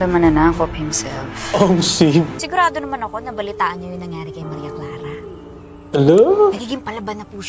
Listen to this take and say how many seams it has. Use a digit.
1